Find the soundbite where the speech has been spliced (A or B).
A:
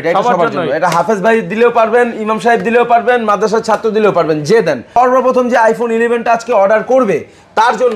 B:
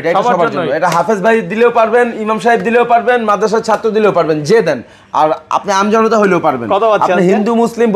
A